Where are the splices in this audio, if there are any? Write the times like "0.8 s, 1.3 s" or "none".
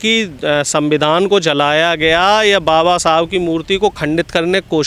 none